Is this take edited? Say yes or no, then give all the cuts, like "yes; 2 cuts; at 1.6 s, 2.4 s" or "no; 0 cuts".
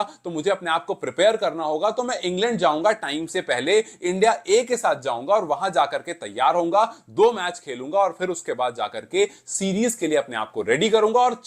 no; 0 cuts